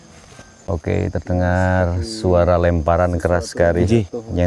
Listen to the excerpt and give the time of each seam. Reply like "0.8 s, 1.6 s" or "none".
1.1 s